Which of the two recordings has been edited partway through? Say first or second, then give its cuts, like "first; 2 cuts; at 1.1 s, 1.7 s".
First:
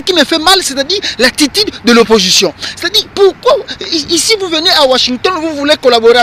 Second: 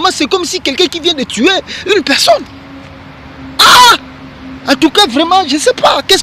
second; 1 cut; at 2.4 s